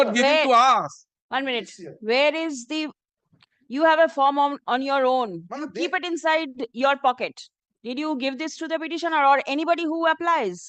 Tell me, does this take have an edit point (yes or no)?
no